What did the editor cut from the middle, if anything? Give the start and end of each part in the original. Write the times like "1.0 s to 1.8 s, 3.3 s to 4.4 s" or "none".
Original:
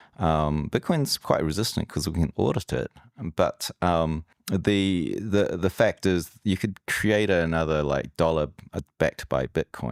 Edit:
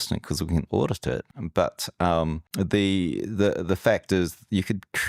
3.0 s to 3.2 s, 4.2 s to 4.4 s